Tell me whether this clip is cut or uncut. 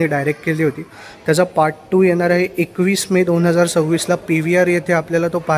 uncut